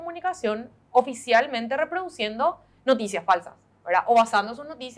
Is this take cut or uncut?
uncut